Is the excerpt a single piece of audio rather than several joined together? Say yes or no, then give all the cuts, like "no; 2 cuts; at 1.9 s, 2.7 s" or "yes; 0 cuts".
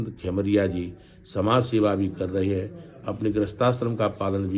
yes; 0 cuts